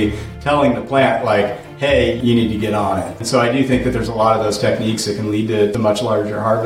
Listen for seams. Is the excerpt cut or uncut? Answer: cut